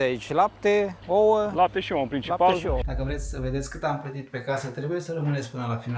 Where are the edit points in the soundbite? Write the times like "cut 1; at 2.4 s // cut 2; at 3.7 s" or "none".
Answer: cut 1; at 1.0 s // cut 2; at 2.9 s